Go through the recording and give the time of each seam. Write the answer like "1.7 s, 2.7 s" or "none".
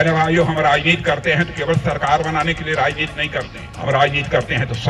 3.6 s